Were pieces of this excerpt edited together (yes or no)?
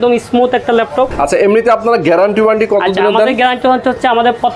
yes